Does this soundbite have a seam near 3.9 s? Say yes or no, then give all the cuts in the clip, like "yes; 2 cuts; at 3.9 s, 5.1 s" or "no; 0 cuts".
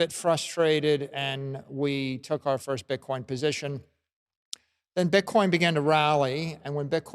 yes; 1 cut; at 3.9 s